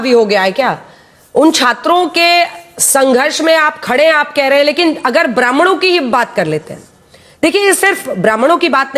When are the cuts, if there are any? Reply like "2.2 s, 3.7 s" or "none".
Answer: none